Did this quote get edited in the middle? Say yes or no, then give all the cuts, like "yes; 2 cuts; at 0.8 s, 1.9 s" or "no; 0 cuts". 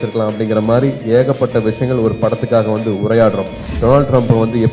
yes; 1 cut; at 3.7 s